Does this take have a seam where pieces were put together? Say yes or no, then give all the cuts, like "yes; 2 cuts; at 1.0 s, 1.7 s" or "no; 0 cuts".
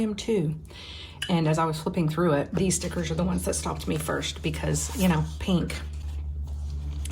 yes; 1 cut; at 2.5 s